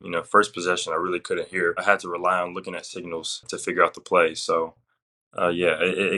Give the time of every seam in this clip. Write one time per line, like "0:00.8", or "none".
0:01.8
0:03.5